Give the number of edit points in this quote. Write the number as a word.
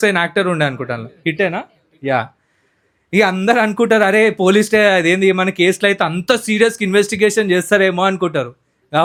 zero